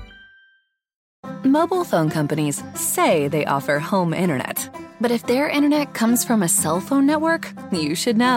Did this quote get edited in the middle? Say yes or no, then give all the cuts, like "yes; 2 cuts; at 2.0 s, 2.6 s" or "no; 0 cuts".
yes; 1 cut; at 1.0 s